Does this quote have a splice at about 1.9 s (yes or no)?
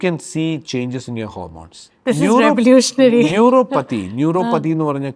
no